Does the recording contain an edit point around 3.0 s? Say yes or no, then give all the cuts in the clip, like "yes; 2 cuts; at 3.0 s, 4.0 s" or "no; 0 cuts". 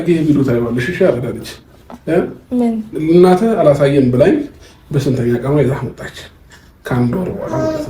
yes; 1 cut; at 3.0 s